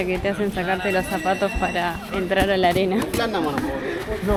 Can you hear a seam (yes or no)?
no